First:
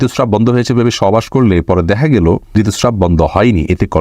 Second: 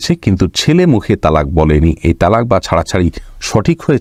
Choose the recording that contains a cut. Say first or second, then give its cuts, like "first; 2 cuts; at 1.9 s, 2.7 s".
first; 1 cut; at 2.5 s